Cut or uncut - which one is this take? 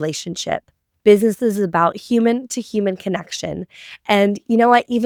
uncut